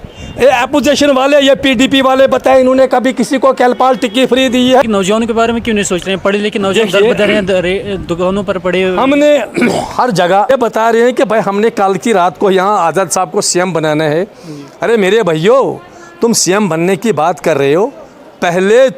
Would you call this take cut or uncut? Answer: cut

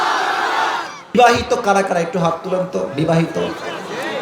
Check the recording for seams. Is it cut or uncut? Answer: cut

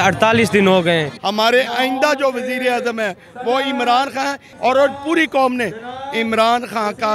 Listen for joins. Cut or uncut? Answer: cut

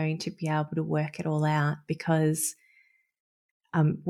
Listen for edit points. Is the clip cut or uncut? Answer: uncut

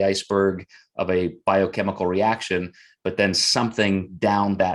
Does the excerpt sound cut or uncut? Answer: uncut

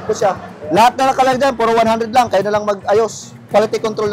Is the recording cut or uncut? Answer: uncut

